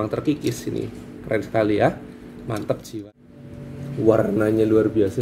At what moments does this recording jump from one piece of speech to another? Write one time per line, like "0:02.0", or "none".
0:02.9